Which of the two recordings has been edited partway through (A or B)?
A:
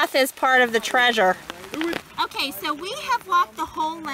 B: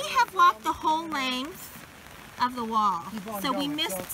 A